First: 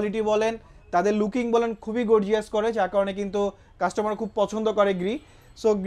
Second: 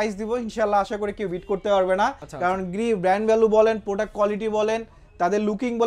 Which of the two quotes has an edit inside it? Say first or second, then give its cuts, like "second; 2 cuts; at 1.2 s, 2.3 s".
second; 1 cut; at 2.2 s